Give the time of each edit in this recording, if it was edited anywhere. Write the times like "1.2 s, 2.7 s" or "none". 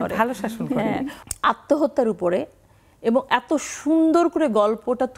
1.2 s